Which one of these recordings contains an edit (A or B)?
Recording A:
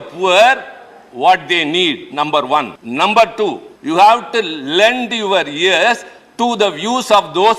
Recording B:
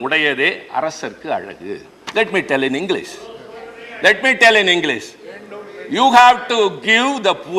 A